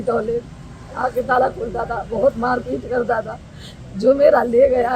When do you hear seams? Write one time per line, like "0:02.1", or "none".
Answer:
none